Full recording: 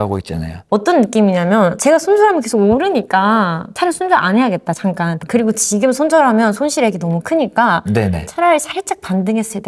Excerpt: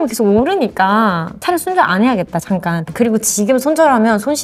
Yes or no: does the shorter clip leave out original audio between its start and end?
no